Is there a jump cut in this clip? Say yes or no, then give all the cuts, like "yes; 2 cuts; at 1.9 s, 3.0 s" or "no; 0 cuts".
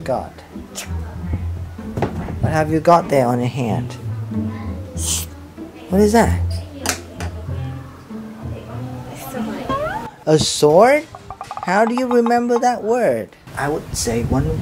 yes; 1 cut; at 13.4 s